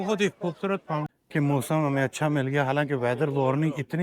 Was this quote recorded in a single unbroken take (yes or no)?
no